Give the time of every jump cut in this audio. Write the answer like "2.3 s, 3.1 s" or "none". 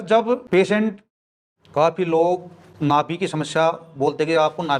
1.1 s